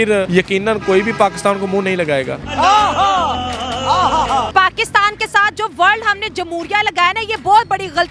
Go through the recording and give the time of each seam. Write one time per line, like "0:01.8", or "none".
0:02.3
0:04.5